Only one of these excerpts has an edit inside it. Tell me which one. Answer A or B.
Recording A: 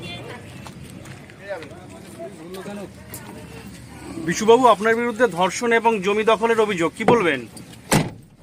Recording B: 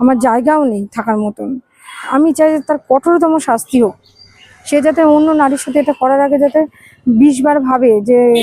B